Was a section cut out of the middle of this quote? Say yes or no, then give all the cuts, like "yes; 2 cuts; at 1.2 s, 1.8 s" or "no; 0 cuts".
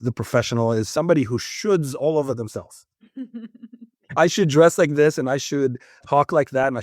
yes; 2 cuts; at 4.2 s, 6.0 s